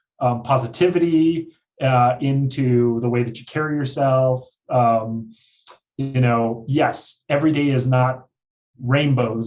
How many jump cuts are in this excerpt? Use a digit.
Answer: 0